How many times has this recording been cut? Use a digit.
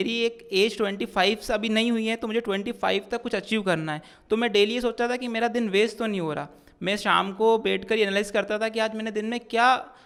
0